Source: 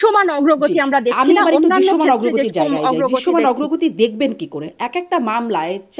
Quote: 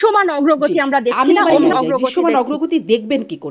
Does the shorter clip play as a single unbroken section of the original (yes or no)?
no